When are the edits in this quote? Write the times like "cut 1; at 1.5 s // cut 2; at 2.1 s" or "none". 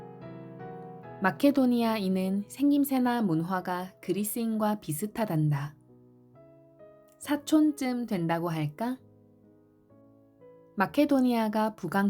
cut 1; at 1.2 s // cut 2; at 9.0 s // cut 3; at 10.7 s